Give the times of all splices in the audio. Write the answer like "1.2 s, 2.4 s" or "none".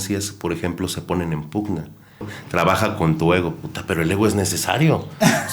2.4 s